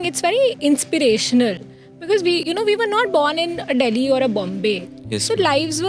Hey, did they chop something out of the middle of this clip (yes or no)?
no